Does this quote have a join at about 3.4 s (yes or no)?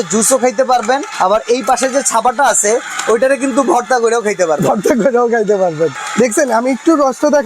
no